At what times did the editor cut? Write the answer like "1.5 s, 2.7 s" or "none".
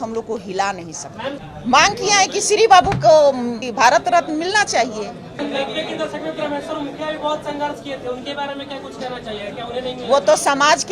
1.4 s, 3.6 s, 5.4 s